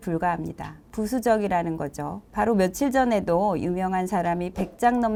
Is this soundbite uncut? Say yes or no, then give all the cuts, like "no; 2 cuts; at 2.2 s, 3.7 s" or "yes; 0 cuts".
yes; 0 cuts